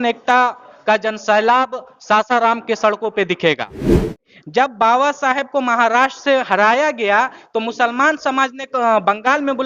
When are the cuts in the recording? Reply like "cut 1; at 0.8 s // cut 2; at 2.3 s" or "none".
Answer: cut 1; at 4.0 s